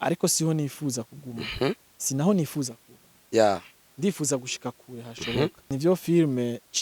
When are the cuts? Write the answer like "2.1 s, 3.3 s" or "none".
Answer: 5.6 s

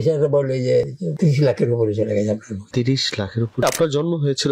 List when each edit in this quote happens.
1.0 s, 2.6 s, 3.6 s

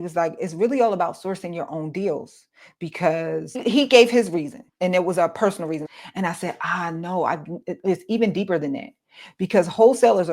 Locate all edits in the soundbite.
3.6 s, 4.6 s, 5.9 s

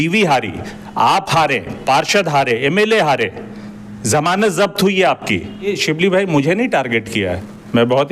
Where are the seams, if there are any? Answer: 5.8 s

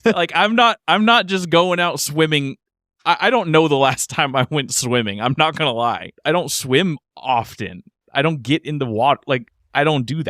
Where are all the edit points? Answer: 6.1 s

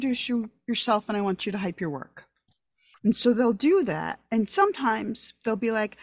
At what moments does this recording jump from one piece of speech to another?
2.9 s

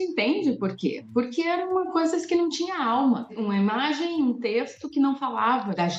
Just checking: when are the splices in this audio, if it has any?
none

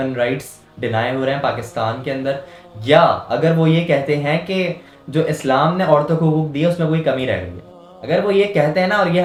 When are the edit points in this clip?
none

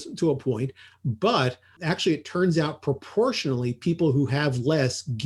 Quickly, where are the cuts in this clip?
none

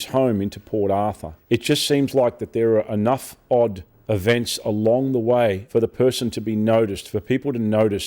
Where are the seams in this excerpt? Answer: 1.3 s, 3.9 s, 5.6 s

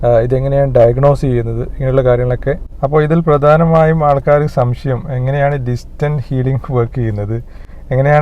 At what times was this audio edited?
2.7 s

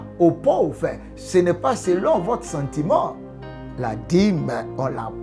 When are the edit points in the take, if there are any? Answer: none

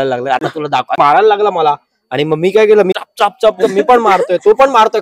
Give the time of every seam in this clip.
0.9 s, 2.9 s

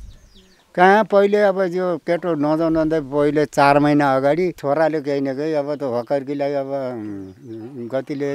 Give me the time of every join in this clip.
4.6 s

